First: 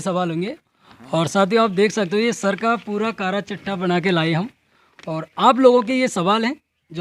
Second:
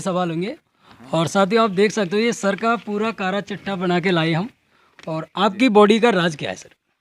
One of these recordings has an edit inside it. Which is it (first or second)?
second